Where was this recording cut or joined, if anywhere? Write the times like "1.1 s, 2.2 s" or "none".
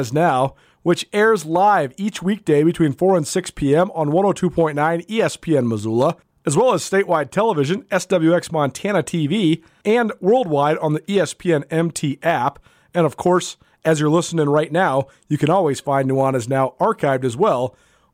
6.3 s, 9.7 s

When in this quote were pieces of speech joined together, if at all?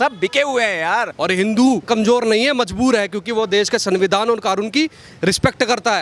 1.1 s, 1.9 s

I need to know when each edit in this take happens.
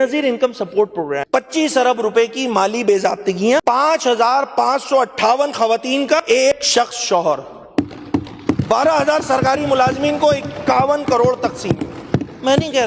1.2 s, 3.6 s, 6.4 s

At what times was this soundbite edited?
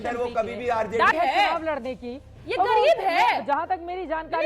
1.1 s

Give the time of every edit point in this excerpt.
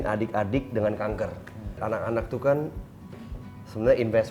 1.8 s

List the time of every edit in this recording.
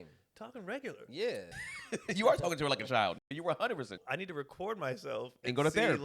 1.5 s, 3.9 s

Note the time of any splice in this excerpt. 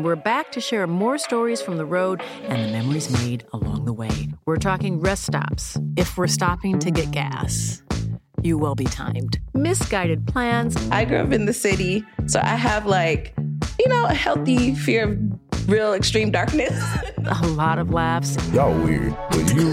none

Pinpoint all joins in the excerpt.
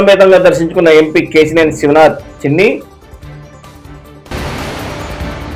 none

